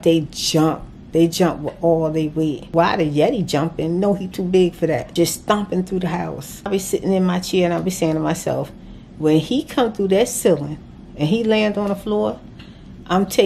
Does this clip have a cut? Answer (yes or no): yes